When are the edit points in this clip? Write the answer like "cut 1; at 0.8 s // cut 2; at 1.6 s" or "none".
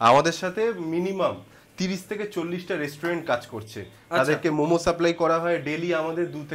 none

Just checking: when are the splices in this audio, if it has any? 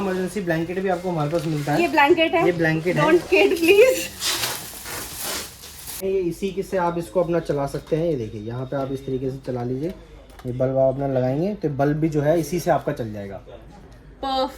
cut 1; at 6.0 s

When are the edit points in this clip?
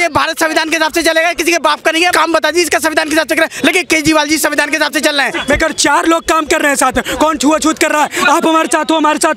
cut 1; at 2.1 s // cut 2; at 5.3 s

